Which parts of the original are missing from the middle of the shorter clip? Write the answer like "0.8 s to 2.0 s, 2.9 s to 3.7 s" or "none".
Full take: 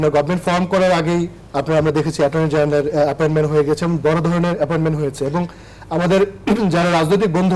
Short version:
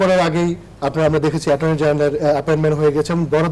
none